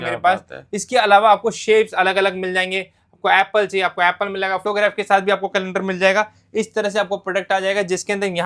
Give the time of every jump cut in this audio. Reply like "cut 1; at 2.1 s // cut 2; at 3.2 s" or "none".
cut 1; at 4.6 s